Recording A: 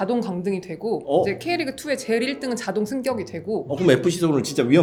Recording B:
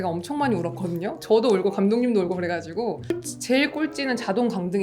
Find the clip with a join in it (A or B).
B